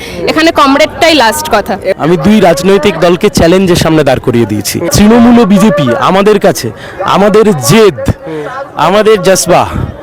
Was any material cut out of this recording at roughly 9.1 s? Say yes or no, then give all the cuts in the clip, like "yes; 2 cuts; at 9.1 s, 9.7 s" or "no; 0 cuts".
no; 2 cuts; at 1.9 s, 4.9 s